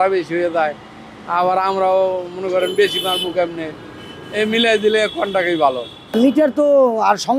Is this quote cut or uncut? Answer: cut